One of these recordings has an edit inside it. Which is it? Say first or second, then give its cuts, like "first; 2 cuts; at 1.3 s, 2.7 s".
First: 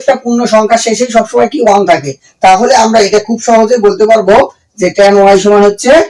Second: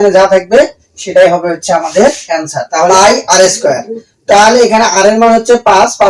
second; 1 cut; at 2.9 s